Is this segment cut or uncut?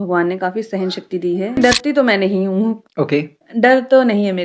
cut